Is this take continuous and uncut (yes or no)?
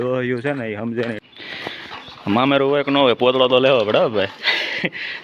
no